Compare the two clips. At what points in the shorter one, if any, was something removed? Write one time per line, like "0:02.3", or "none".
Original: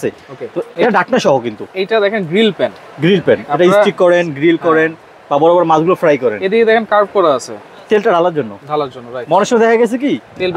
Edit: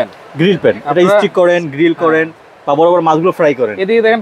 none

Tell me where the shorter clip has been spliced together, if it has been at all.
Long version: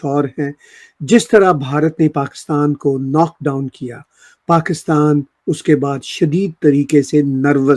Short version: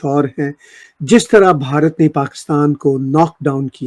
none

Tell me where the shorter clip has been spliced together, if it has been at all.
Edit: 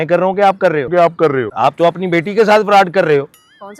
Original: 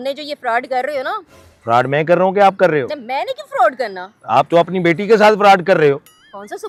0:01.1

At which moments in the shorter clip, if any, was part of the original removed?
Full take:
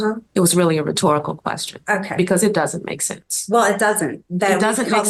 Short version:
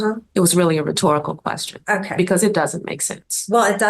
none

